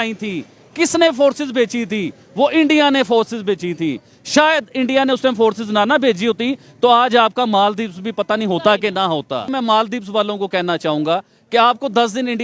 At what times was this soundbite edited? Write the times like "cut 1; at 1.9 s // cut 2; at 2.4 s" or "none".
cut 1; at 9.5 s